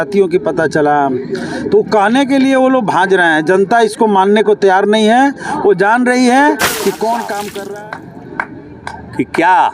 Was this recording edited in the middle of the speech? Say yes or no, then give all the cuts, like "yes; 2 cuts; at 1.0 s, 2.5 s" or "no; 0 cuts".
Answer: yes; 1 cut; at 7.6 s